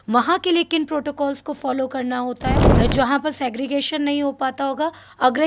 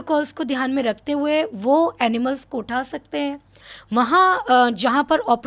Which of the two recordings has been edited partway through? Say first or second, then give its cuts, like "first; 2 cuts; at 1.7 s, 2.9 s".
first; 1 cut; at 2.7 s